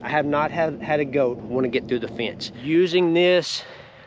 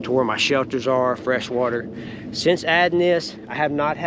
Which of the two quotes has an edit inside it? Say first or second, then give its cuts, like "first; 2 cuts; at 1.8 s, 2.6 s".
first; 1 cut; at 2.5 s